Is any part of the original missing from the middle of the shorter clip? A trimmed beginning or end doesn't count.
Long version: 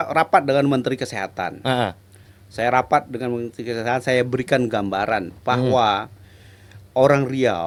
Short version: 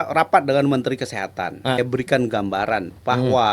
yes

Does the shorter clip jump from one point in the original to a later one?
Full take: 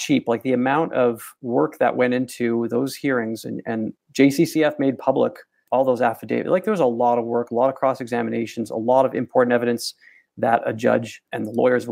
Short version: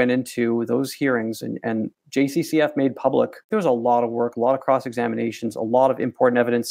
yes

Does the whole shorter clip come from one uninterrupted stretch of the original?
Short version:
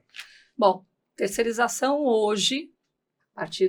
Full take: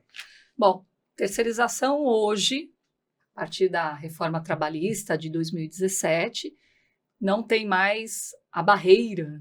yes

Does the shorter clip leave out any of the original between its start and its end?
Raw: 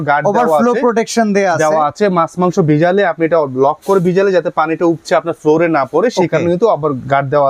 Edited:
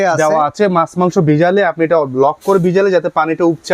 no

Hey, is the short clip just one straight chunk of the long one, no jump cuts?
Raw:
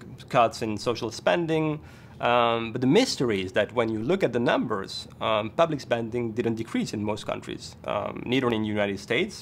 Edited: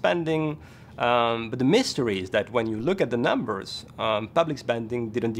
yes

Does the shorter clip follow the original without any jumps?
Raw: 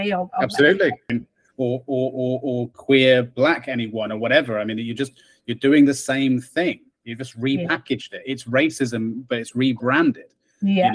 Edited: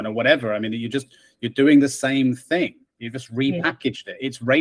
yes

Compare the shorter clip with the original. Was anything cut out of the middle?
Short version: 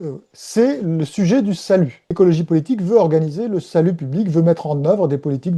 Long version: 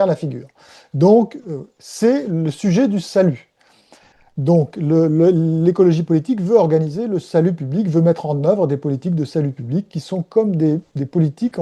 yes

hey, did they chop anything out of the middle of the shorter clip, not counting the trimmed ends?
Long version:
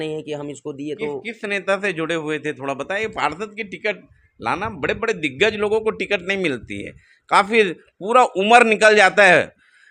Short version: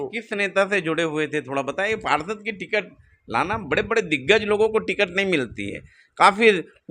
no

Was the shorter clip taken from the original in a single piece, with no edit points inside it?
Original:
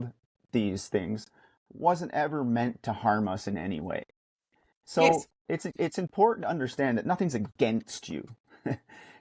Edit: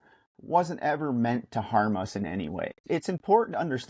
no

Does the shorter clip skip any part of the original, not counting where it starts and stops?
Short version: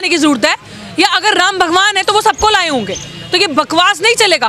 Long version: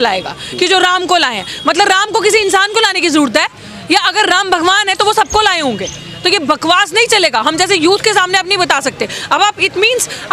no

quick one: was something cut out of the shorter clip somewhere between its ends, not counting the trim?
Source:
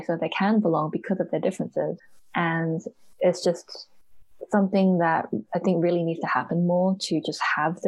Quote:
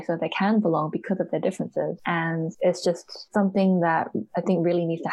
yes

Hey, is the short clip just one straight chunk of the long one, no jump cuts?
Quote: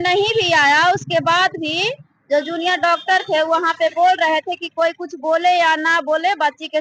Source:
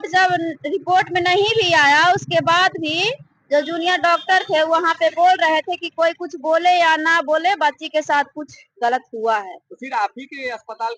yes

